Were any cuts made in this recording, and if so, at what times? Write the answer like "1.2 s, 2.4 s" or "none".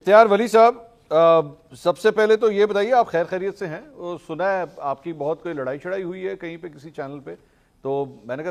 none